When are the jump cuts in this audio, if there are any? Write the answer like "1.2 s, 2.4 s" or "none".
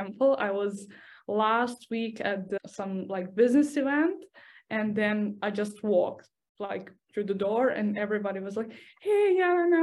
2.6 s